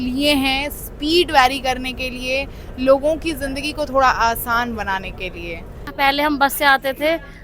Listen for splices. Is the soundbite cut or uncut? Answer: cut